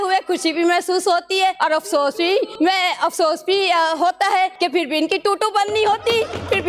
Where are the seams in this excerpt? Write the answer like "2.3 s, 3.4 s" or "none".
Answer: 1.6 s, 2.5 s, 4.5 s